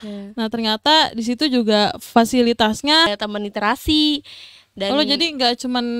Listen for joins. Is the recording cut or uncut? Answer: cut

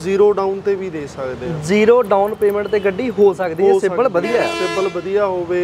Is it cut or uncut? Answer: uncut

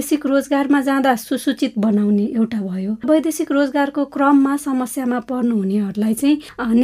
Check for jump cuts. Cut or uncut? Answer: cut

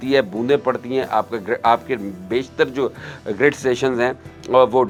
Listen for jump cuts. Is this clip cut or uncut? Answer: uncut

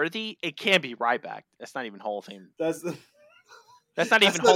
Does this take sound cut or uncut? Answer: uncut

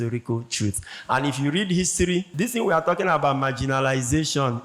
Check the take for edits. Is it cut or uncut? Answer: cut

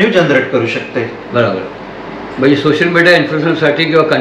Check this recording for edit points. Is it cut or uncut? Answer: uncut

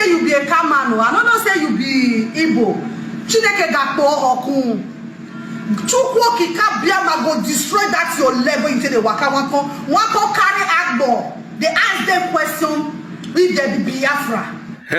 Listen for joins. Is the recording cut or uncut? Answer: uncut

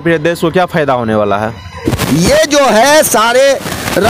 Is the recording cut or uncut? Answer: cut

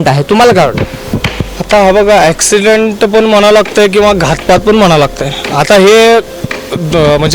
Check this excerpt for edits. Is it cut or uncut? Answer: uncut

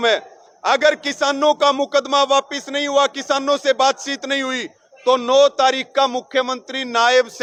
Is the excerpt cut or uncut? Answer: uncut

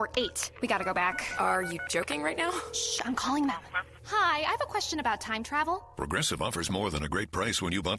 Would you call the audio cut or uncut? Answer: uncut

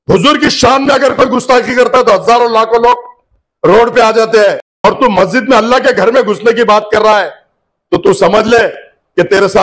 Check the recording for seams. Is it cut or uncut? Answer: cut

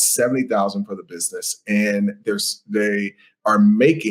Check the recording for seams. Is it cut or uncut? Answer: uncut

